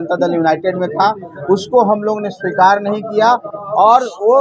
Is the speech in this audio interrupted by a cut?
no; 0 cuts

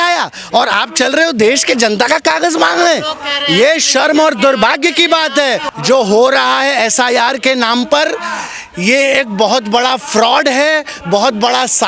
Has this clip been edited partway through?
yes; 1 cut; at 5.7 s

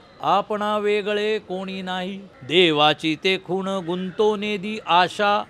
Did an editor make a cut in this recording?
yes; 1 cut; at 2.3 s

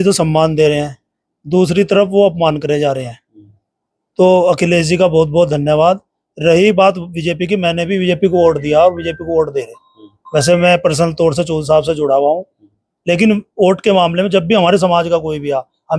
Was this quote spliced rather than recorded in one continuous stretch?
no; 0 cuts

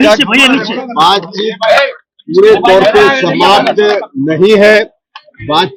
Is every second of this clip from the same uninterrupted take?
yes; 0 cuts

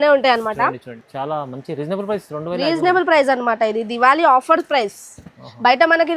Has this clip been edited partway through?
yes; 1 cut; at 0.9 s

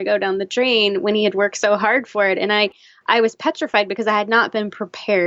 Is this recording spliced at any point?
no; 0 cuts

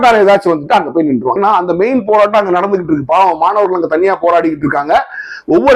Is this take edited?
yes; 1 cut; at 1.4 s

